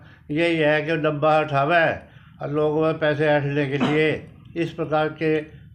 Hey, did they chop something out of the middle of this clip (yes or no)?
no